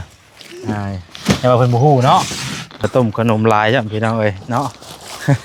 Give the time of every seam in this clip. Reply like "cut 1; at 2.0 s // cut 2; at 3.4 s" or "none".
cut 1; at 2.8 s